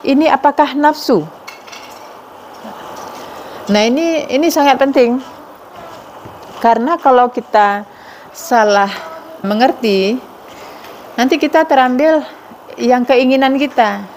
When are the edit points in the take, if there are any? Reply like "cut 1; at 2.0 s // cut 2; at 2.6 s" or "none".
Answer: cut 1; at 9.5 s